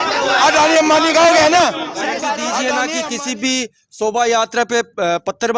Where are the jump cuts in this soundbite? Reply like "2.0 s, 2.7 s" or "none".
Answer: 2.8 s